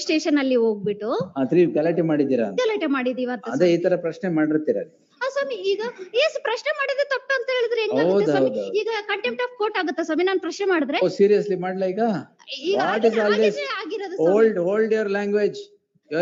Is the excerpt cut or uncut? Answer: uncut